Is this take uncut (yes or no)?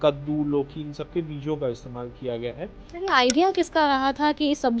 no